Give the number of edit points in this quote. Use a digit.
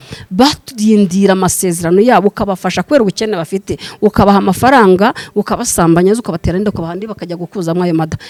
0